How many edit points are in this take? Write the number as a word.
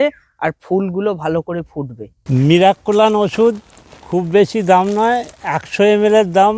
zero